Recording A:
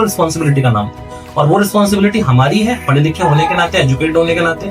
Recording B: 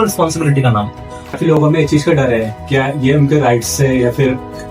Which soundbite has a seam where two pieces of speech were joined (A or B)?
B